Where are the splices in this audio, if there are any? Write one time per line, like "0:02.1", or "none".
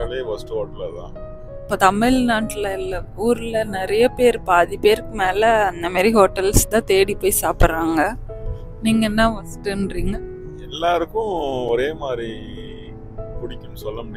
0:01.5